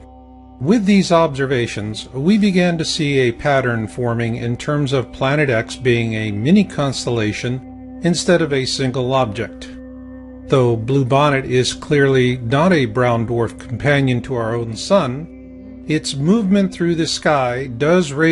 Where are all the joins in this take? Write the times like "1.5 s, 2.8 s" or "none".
none